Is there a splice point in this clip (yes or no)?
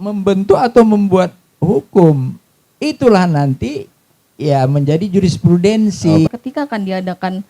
yes